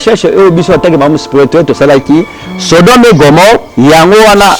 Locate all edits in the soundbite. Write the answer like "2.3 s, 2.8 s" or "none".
none